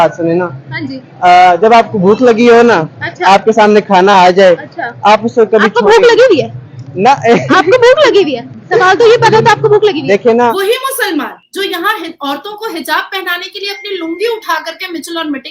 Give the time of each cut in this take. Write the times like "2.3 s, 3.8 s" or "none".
10.6 s

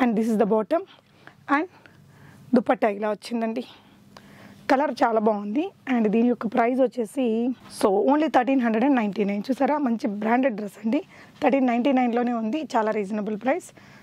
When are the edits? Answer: none

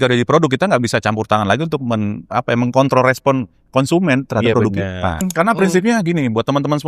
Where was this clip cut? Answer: 5.2 s

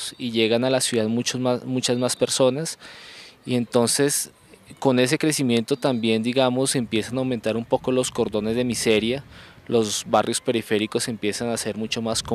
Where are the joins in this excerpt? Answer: 7.8 s

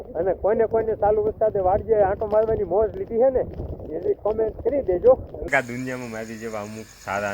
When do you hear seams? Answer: 5.4 s

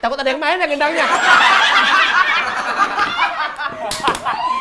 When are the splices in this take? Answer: none

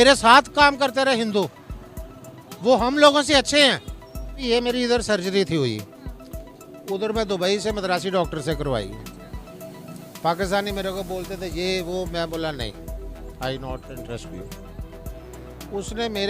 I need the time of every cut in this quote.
4.4 s

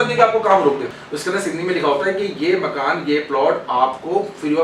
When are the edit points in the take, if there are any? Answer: 1.0 s

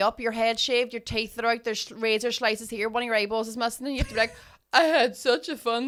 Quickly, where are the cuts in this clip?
none

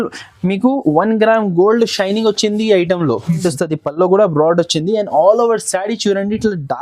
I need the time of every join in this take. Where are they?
3.4 s

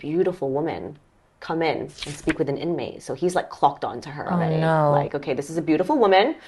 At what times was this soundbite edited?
none

